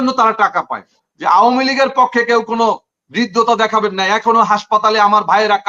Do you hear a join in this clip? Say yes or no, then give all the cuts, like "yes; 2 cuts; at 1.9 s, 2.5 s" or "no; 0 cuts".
yes; 1 cut; at 1.0 s